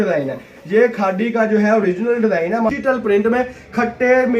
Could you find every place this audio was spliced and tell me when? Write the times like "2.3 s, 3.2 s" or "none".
2.7 s